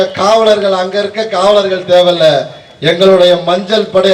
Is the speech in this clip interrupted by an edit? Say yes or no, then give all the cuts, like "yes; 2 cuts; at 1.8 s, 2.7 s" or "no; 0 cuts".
no; 0 cuts